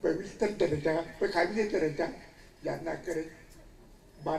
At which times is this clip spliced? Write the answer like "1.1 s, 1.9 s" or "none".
none